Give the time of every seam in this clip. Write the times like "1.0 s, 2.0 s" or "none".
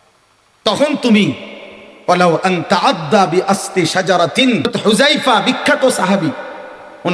4.7 s